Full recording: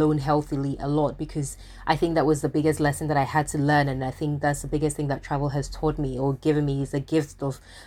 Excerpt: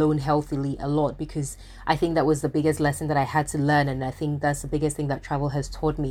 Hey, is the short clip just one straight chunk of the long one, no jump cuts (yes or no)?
yes